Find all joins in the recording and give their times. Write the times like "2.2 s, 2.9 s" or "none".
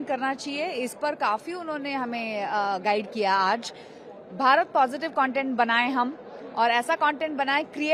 none